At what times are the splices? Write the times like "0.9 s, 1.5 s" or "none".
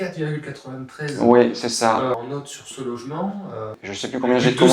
2.1 s, 3.8 s